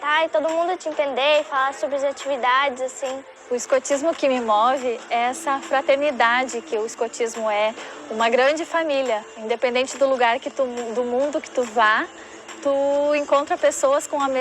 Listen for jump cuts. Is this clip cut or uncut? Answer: cut